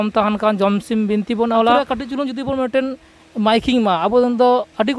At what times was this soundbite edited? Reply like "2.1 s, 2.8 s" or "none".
1.9 s